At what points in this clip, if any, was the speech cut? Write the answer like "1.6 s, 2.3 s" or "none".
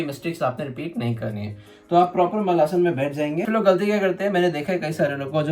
3.5 s